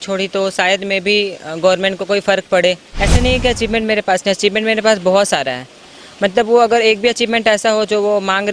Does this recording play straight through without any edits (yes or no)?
no